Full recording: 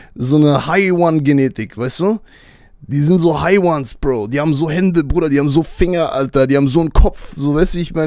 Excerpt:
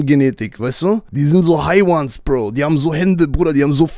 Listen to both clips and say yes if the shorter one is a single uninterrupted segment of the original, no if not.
no